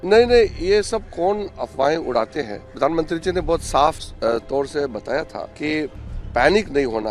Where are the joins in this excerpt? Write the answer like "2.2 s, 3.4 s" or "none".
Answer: 2.6 s, 4.1 s, 5.4 s